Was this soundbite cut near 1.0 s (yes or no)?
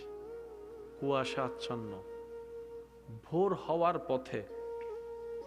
no